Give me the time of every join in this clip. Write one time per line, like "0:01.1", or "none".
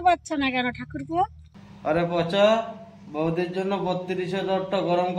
0:01.6